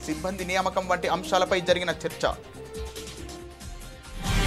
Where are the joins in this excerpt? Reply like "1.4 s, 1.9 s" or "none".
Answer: 2.4 s